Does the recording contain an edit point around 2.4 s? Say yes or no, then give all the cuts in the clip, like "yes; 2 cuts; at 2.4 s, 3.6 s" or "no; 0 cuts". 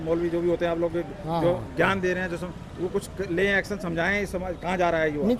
no; 0 cuts